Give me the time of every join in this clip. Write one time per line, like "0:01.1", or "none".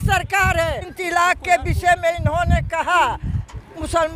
0:00.9